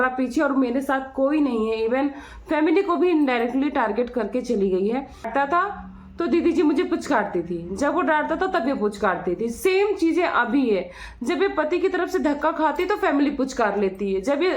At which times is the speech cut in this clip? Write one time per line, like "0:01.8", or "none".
0:05.3